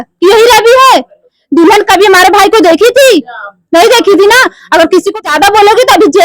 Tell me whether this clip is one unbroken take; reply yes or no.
no